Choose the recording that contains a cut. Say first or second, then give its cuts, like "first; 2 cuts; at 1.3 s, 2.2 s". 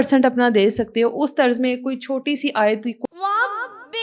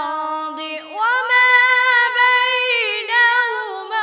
first; 1 cut; at 3.0 s